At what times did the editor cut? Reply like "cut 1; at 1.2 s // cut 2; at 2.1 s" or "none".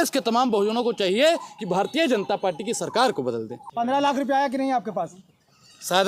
cut 1; at 3.6 s